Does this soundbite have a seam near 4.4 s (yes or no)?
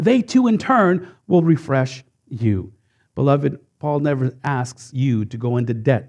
no